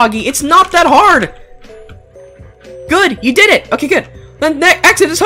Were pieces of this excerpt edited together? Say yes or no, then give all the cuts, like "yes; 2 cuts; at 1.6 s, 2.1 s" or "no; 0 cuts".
no; 0 cuts